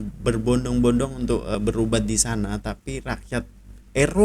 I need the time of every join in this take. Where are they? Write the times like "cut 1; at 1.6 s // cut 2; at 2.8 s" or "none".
cut 1; at 1.5 s